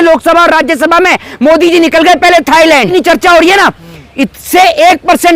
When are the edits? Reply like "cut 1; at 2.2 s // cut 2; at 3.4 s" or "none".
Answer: cut 1; at 2.9 s